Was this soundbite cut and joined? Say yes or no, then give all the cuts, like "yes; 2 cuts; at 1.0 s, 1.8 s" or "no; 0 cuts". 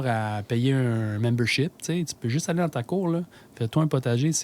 no; 0 cuts